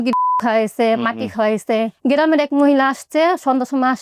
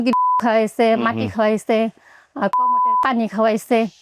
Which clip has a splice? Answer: first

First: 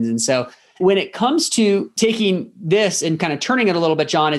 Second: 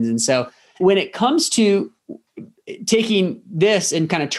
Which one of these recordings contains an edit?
first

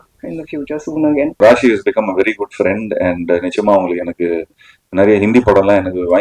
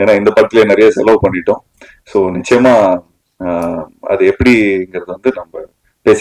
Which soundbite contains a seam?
first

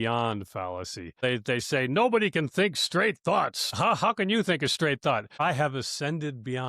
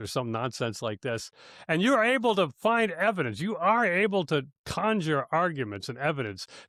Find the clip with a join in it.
first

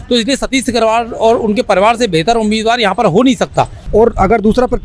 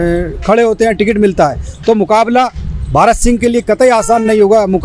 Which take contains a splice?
first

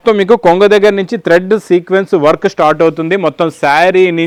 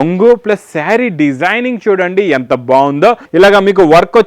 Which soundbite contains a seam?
second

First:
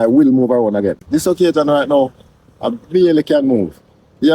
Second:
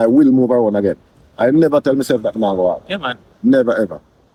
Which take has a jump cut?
first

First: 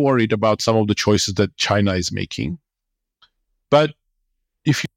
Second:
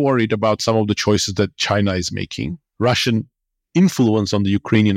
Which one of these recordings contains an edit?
second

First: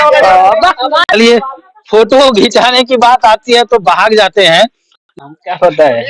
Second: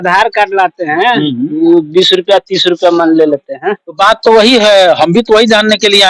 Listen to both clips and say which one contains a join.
first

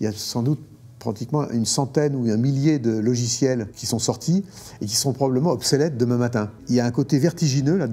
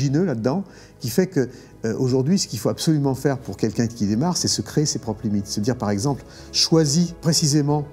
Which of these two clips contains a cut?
first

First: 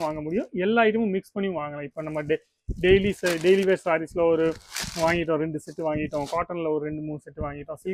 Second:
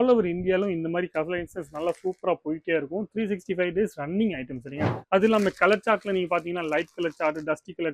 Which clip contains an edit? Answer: second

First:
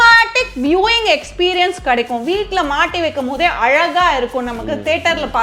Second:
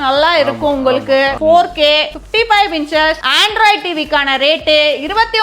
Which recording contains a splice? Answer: second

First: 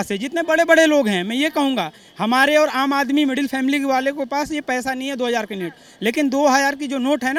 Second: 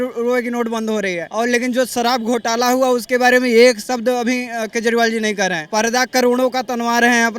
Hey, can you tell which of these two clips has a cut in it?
second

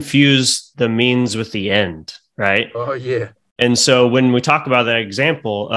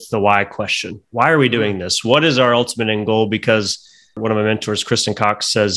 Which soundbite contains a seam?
second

